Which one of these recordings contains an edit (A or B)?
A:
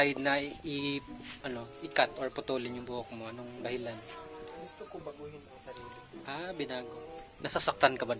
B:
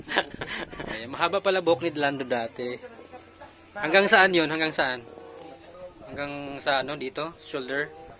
B